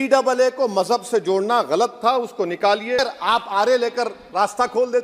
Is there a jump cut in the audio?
yes; 1 cut; at 3.0 s

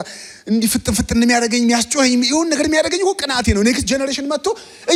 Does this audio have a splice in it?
no; 0 cuts

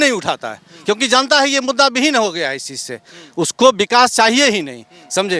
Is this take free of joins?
yes; 0 cuts

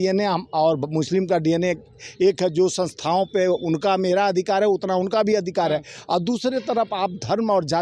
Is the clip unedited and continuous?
yes; 0 cuts

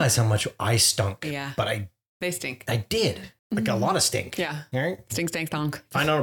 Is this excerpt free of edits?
no; 1 cut; at 3.3 s

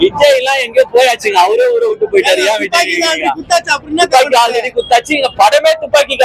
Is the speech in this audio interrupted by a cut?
no; 0 cuts

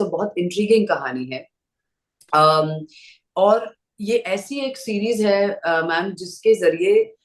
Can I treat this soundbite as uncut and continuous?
yes; 0 cuts

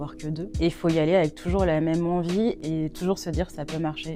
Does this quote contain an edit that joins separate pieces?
no; 0 cuts

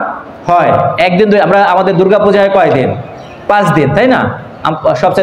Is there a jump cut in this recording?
no; 0 cuts

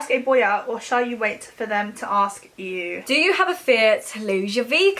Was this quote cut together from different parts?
yes; 1 cut; at 3.0 s

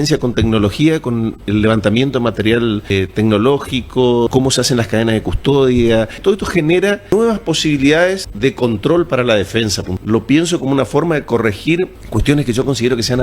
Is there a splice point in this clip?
yes; 7 cuts; at 2.9 s, 4.3 s, 6.2 s, 7.1 s, 8.3 s, 9.9 s, 12.0 s

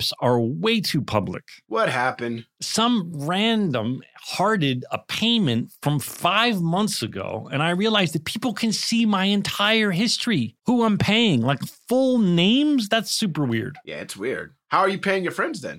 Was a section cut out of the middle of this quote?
no; 0 cuts

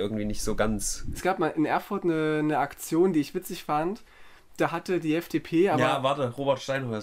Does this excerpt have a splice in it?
yes; 1 cut; at 1.2 s

